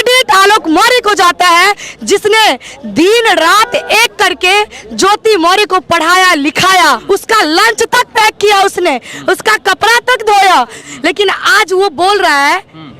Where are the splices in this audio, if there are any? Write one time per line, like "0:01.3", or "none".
0:07.0
0:10.8